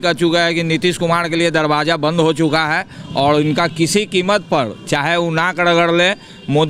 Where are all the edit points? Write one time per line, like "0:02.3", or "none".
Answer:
none